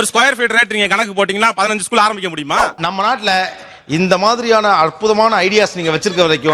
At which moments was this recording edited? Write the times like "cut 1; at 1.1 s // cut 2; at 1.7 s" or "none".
cut 1; at 2.8 s

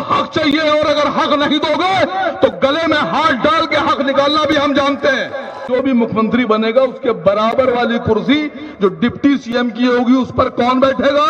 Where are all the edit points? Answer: cut 1; at 5.6 s

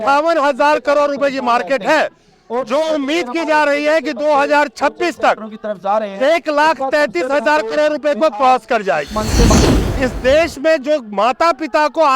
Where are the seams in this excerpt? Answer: cut 1; at 9.5 s

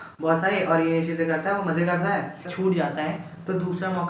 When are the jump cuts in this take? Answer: cut 1; at 2.5 s

